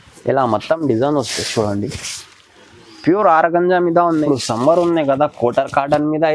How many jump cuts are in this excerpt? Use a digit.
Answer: 1